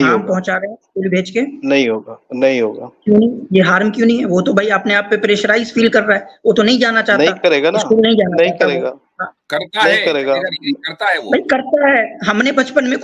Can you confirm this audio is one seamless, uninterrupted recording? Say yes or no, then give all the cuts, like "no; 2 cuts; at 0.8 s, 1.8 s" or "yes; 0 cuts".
yes; 0 cuts